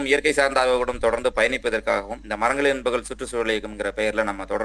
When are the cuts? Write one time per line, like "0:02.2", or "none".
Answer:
0:02.2